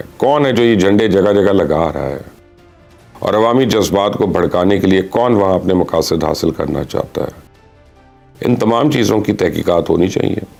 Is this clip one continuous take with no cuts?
yes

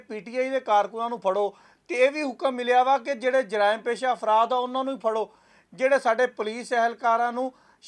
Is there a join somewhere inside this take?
no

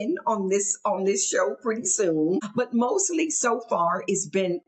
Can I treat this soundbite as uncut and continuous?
no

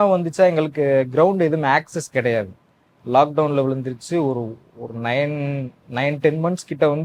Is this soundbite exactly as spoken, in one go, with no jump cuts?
yes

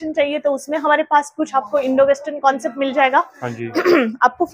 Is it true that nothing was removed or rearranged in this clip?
yes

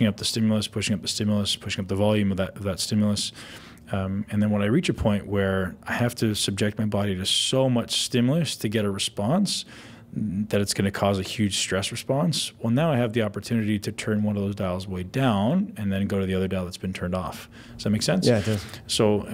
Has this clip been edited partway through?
no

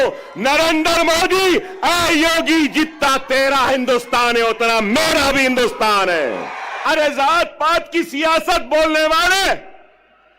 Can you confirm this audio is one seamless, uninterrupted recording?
no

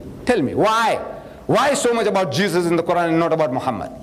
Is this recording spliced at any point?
yes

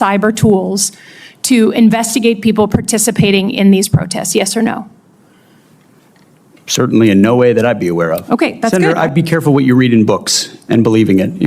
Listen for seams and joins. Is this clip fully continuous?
no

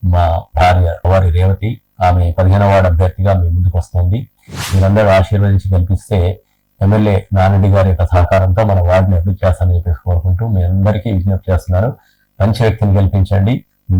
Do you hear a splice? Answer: yes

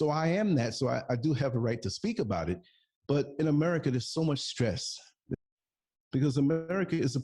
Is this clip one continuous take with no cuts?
no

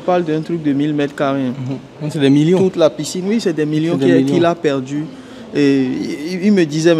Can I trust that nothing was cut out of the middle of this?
yes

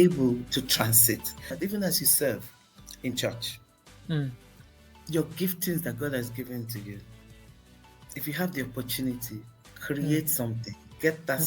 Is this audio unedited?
no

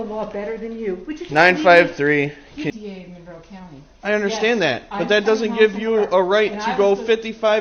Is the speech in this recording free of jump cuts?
no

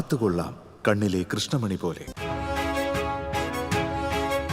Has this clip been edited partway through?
yes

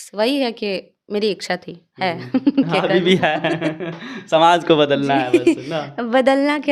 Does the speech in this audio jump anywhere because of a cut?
no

